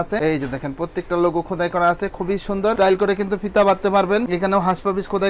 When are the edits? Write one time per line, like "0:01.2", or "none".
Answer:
none